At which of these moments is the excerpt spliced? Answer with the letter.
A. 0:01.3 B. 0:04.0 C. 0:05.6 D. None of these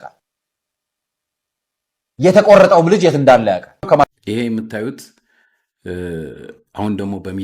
B